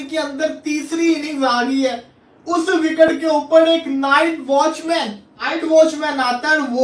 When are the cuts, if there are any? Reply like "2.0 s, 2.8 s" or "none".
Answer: 5.5 s